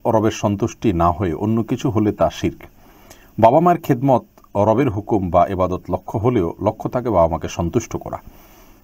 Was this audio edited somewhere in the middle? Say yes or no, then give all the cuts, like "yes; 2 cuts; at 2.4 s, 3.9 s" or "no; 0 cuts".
no; 0 cuts